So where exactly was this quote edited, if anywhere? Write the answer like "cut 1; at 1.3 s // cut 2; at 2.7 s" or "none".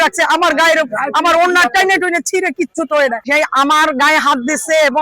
cut 1; at 3.2 s